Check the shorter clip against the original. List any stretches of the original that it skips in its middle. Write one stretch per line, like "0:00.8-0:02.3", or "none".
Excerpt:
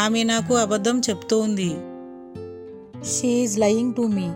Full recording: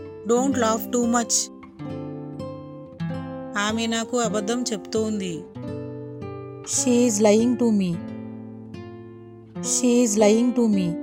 none